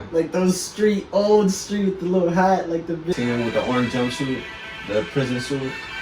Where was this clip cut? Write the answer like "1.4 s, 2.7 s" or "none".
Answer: 3.1 s